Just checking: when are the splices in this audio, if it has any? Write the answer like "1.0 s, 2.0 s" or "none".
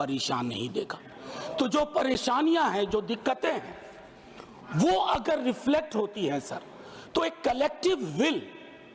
none